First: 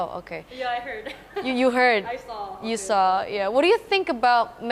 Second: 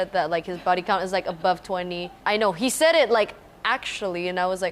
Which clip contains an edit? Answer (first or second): second